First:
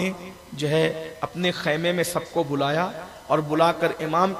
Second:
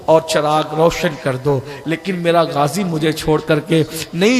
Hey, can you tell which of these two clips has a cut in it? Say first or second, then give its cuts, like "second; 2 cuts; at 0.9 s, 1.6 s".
second; 1 cut; at 1.7 s